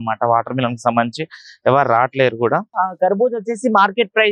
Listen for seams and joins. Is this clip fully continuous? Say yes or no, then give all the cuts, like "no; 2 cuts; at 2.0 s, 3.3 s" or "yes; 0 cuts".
no; 1 cut; at 2.7 s